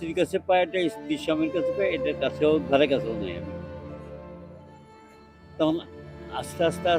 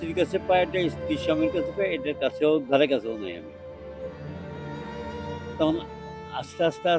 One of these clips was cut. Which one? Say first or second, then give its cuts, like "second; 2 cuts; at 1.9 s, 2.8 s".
second; 2 cuts; at 3.4 s, 5.2 s